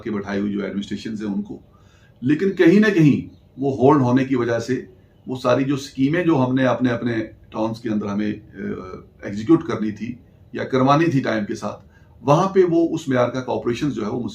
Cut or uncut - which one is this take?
uncut